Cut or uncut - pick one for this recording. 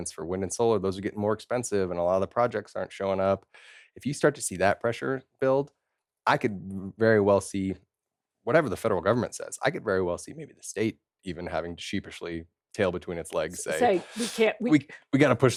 uncut